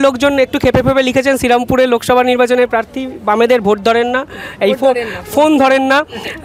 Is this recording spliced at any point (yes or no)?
no